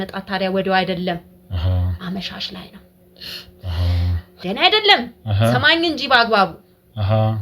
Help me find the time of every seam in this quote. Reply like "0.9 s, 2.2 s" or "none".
4.3 s